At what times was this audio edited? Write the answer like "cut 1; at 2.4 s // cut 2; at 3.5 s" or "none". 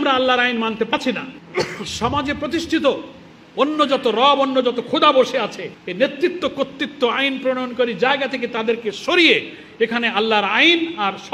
cut 1; at 0.9 s